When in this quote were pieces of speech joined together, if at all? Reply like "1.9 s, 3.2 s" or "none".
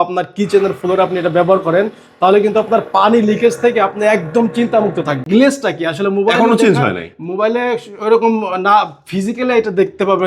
5.2 s